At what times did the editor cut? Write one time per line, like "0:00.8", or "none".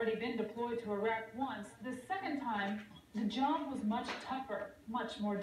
0:03.0